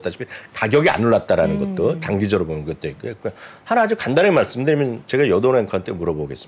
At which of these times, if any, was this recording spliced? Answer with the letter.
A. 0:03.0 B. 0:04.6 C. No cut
C